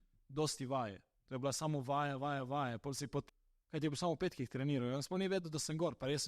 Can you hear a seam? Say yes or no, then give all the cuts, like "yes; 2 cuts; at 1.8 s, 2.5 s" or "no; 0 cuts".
yes; 1 cut; at 3.3 s